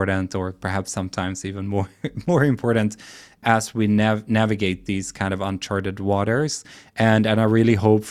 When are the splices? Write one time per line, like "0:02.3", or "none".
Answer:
0:03.4